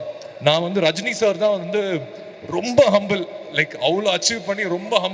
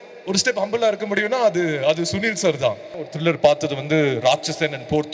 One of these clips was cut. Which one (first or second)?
second